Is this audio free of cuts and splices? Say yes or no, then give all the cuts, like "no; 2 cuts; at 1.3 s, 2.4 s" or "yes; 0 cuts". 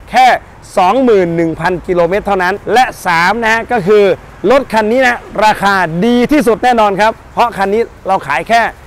no; 1 cut; at 2.6 s